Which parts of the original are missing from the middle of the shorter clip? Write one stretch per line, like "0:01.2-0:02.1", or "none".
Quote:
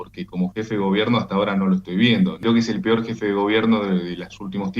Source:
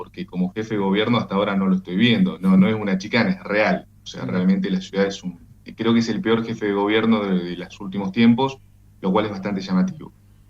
0:02.4-0:05.8